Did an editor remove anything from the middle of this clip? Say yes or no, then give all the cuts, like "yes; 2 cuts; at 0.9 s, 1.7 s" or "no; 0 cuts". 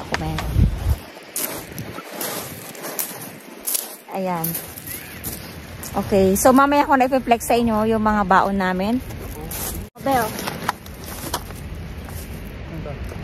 yes; 1 cut; at 10.0 s